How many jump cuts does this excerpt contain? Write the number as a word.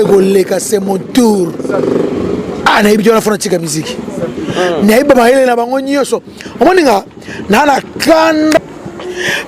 one